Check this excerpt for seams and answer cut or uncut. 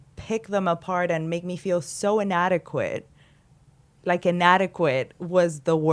uncut